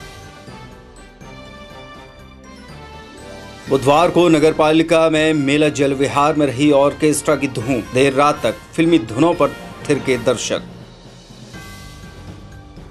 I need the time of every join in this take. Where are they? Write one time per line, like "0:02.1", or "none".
none